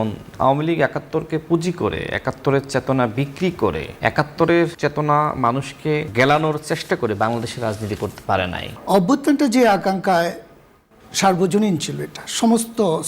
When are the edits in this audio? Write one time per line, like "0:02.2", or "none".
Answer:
0:03.9
0:04.7
0:06.1
0:08.7